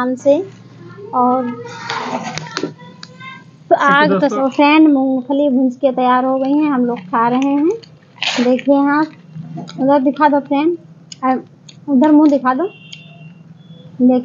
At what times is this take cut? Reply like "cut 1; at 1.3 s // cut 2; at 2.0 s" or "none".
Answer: cut 1; at 4.4 s

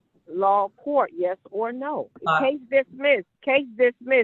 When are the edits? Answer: cut 1; at 2.2 s // cut 2; at 3.3 s

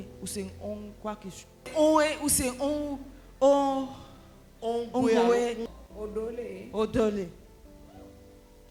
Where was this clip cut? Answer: none

